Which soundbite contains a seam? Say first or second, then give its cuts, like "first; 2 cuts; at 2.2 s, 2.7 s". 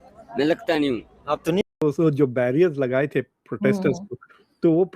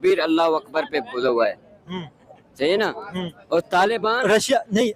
first; 1 cut; at 1.6 s